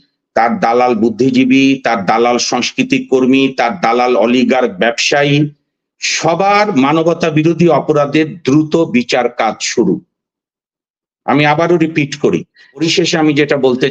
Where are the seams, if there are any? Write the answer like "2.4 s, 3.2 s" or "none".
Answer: 12.8 s